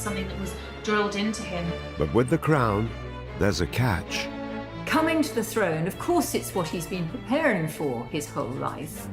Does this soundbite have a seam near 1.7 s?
yes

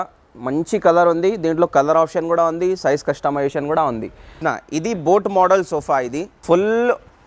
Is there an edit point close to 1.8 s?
no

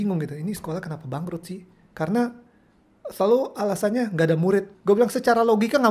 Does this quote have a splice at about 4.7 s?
yes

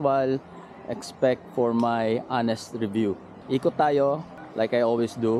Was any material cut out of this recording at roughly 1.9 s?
no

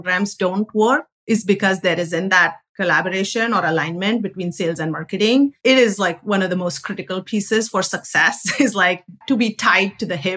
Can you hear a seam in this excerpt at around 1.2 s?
no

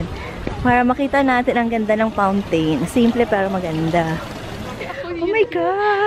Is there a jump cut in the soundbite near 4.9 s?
yes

